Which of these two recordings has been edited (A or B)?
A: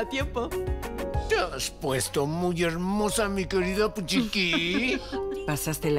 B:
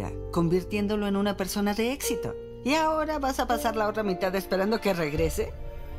A